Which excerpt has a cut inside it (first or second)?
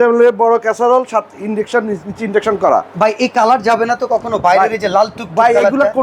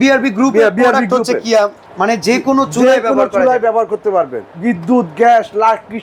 second